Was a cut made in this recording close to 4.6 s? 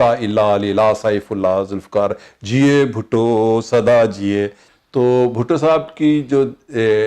yes; 1 cut; at 4.6 s

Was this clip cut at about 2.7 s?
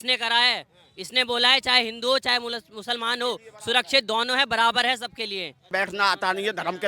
no; 1 cut; at 5.7 s

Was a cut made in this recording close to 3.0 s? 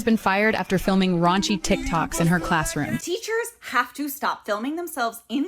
yes; 1 cut; at 3.0 s

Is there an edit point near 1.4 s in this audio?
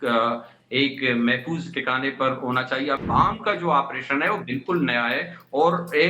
no; 1 cut; at 3.0 s

